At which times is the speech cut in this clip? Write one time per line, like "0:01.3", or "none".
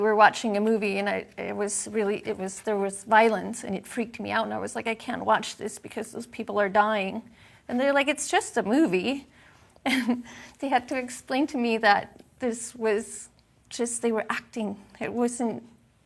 none